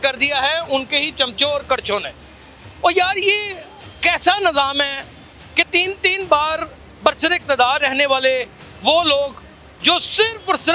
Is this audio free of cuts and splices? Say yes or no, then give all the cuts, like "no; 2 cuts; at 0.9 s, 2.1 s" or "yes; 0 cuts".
yes; 0 cuts